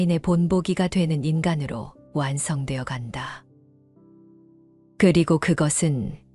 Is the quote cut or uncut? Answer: cut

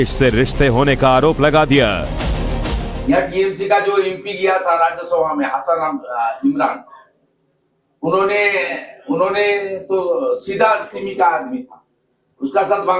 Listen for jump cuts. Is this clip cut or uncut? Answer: uncut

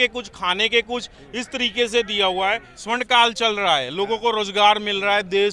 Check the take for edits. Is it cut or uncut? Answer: cut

